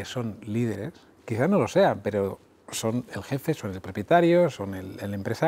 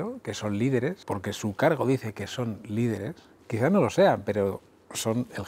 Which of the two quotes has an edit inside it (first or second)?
second